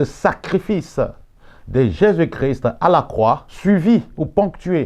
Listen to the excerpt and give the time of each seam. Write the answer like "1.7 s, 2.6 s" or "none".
3.5 s